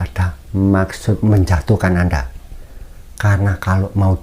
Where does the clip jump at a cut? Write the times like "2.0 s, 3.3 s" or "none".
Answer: 1.2 s